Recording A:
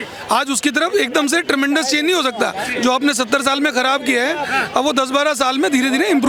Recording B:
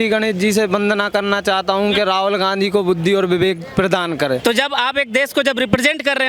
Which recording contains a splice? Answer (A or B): B